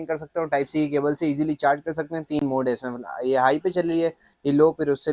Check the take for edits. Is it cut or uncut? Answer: uncut